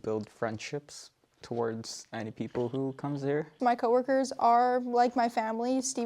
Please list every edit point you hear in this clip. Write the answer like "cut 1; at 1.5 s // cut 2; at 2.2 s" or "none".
cut 1; at 3.5 s